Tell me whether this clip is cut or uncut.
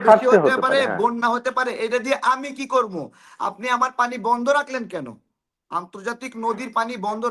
uncut